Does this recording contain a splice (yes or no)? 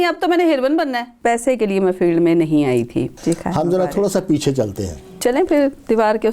yes